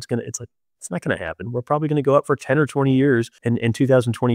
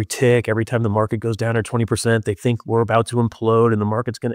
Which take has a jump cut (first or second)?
first